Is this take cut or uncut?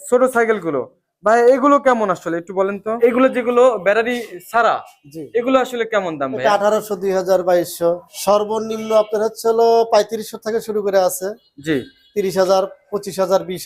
cut